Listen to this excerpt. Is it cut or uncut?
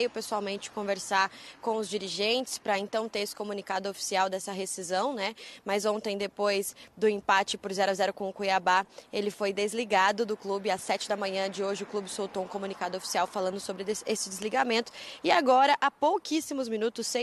uncut